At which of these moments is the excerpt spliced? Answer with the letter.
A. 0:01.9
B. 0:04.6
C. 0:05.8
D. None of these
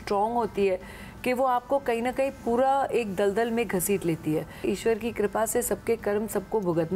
B